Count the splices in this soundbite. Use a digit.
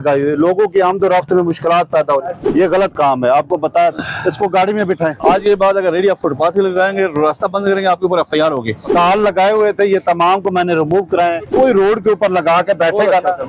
4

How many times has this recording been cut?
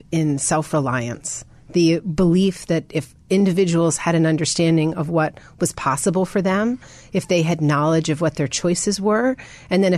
0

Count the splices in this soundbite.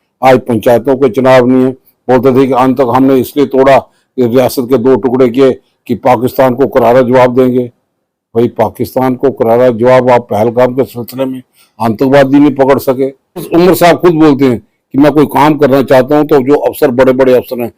1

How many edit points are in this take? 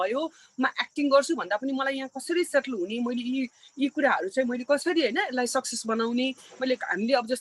0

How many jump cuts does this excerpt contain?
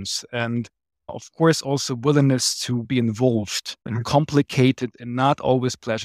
1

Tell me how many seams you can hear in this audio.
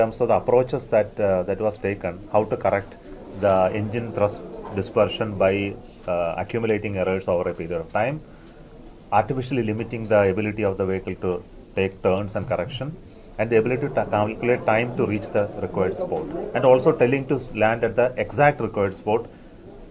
0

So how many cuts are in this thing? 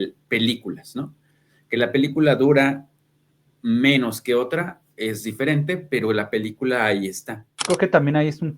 1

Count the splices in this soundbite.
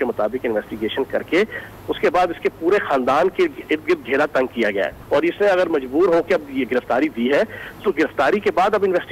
1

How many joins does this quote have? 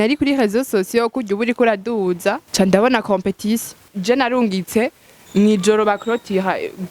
2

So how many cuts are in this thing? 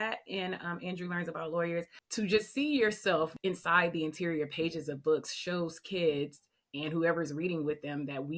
2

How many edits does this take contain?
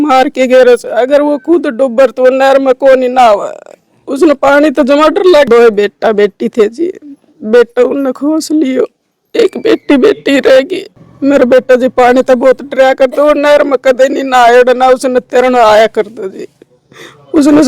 2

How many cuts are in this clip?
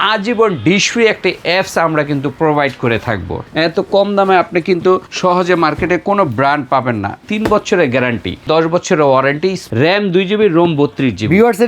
5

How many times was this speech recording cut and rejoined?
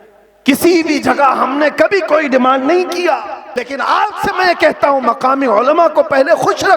1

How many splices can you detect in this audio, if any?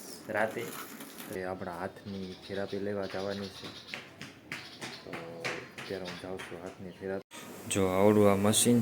2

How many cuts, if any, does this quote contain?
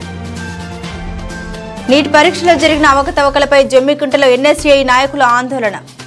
1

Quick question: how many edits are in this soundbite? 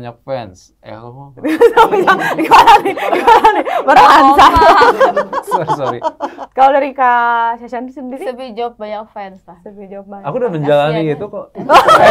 0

